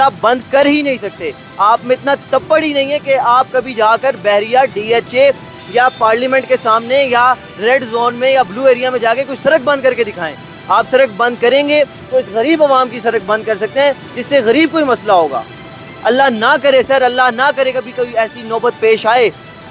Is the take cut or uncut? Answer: uncut